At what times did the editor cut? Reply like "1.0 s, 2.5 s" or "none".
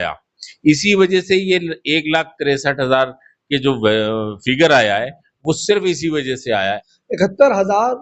6.8 s

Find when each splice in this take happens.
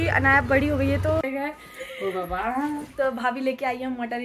1.2 s

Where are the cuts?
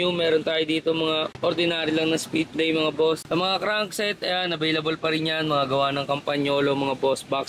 none

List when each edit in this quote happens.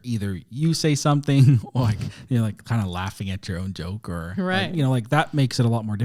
none

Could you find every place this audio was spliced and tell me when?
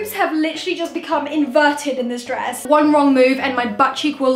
2.6 s

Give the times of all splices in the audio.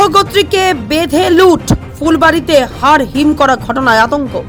none

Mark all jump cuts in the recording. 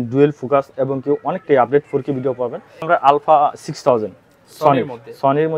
2.9 s

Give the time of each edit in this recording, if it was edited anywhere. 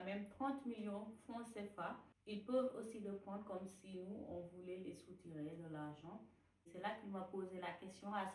2.1 s, 6.6 s

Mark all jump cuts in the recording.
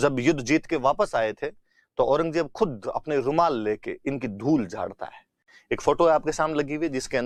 none

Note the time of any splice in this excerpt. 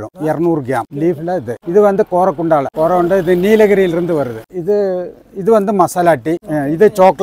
0.9 s, 4.4 s

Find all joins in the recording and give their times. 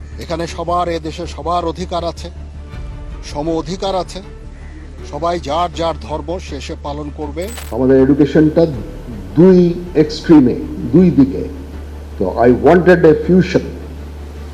7.6 s

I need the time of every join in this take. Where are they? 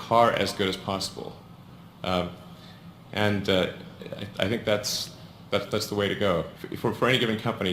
0.8 s, 6.1 s

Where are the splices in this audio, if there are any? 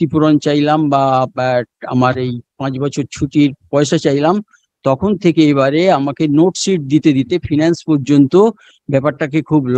none

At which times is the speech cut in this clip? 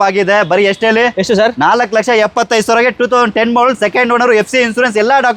none

